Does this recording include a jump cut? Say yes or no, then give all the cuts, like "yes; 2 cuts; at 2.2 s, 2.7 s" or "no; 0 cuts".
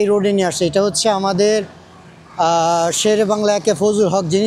no; 0 cuts